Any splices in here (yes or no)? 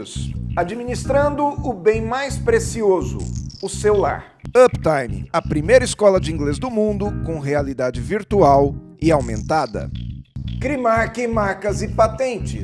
no